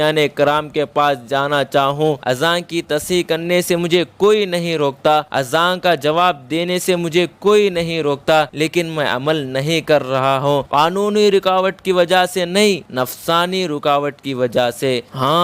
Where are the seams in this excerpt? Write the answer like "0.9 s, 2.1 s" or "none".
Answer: 2.2 s, 5.3 s, 8.5 s, 10.7 s, 12.9 s